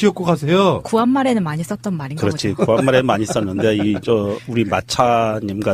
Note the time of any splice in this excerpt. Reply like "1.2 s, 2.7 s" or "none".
4.1 s